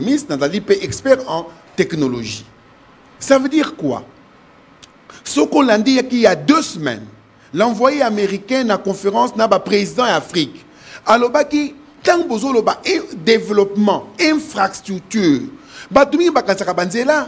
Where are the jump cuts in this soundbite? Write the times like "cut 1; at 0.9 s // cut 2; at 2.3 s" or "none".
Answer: none